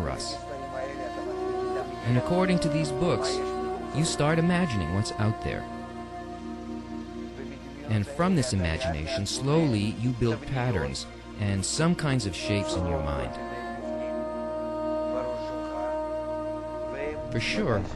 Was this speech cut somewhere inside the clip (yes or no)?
yes